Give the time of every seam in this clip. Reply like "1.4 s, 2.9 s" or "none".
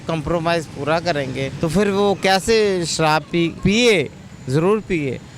1.5 s, 3.5 s